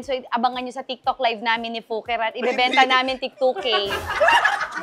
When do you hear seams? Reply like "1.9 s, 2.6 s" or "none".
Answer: none

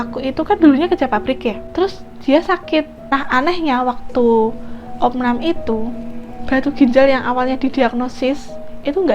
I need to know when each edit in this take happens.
1.6 s, 3.0 s

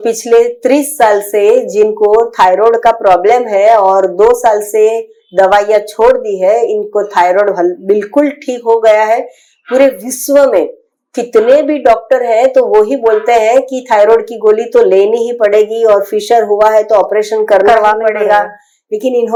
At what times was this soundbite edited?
none

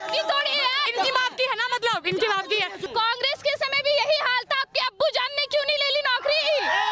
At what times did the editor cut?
0.9 s, 2.8 s

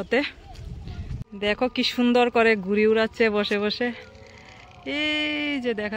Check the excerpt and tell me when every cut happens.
1.2 s

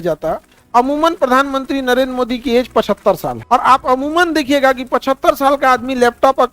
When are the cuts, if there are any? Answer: 3.3 s

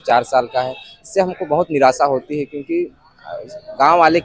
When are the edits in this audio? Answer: none

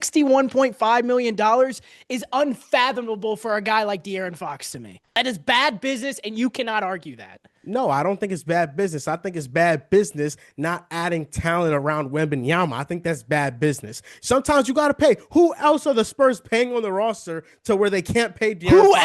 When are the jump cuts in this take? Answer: 5.2 s

